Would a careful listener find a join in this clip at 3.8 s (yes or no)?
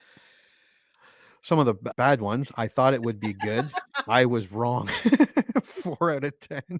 no